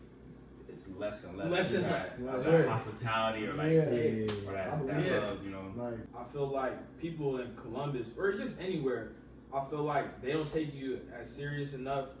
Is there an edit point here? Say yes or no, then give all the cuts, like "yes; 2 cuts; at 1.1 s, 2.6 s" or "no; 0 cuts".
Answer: yes; 1 cut; at 6.1 s